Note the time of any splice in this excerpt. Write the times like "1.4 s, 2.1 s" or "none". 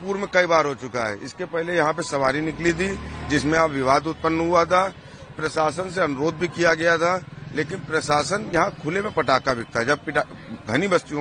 none